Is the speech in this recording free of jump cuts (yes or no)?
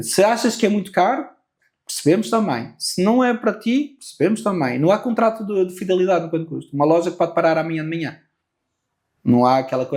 yes